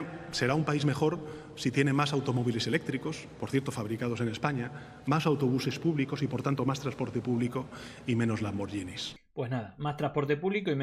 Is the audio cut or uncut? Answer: cut